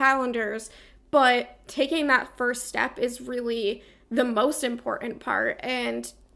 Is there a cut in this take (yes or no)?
no